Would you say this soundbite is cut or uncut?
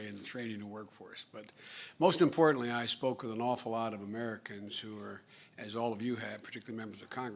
uncut